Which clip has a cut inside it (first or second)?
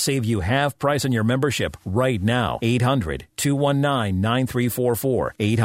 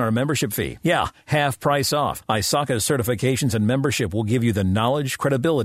second